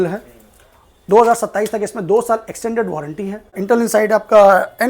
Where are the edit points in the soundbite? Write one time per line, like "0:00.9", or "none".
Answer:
0:03.6